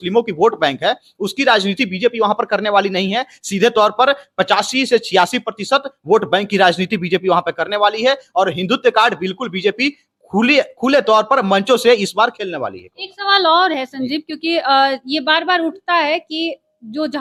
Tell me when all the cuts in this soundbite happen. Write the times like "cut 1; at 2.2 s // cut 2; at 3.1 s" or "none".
none